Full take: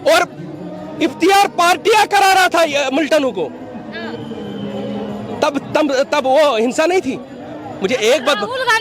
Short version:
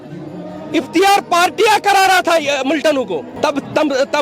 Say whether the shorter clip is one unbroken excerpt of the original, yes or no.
no